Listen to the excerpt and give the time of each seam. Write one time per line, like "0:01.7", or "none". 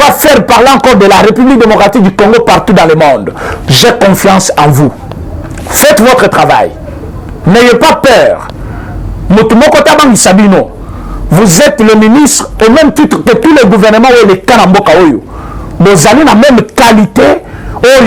none